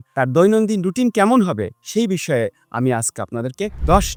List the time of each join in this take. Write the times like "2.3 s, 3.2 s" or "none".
none